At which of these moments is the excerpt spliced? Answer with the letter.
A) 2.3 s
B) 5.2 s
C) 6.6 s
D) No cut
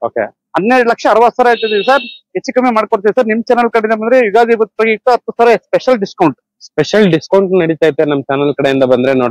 D